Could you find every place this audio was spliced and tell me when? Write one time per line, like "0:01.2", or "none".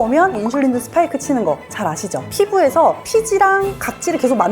0:02.3